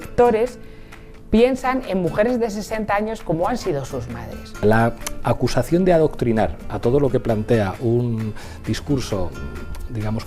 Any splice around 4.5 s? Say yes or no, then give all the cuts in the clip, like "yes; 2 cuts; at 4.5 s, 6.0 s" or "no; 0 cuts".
yes; 1 cut; at 4.5 s